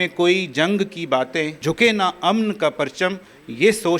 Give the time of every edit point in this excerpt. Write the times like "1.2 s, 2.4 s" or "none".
1.6 s